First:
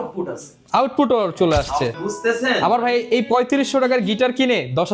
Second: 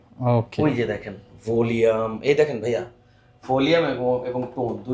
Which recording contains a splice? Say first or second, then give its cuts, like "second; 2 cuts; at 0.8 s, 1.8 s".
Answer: first; 1 cut; at 2.0 s